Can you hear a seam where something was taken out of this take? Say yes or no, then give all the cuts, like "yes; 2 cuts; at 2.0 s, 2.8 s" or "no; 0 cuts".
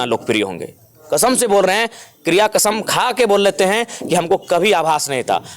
no; 0 cuts